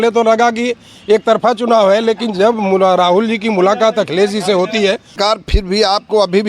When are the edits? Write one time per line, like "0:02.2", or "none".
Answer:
0:05.2